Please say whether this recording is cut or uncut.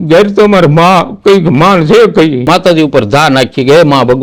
cut